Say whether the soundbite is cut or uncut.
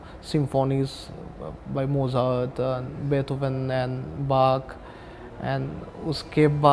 uncut